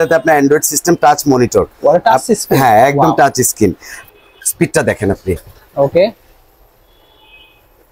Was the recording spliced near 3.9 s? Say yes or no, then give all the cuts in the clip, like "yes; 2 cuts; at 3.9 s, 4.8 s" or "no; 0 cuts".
yes; 1 cut; at 3.9 s